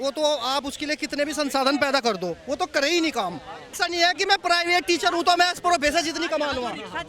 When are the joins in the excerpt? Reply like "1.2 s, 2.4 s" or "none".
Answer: 3.8 s

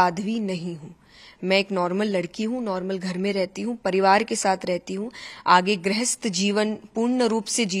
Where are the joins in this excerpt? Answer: none

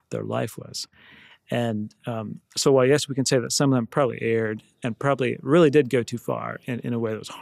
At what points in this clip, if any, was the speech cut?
none

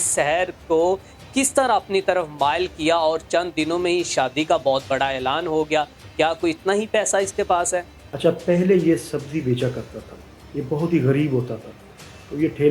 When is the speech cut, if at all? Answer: 8.2 s

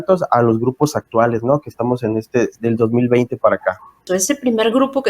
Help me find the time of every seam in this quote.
4.1 s

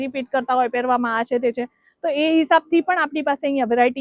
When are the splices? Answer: none

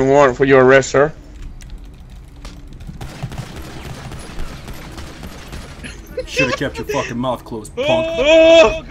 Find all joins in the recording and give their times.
1.3 s

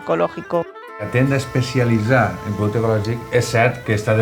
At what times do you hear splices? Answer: 1.1 s

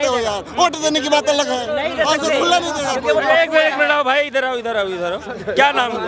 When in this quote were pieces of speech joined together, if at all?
none

